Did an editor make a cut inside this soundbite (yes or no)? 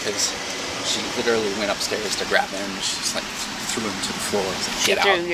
no